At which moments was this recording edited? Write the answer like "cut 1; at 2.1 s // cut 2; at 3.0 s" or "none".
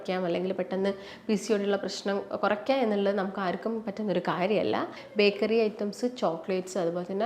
cut 1; at 5.0 s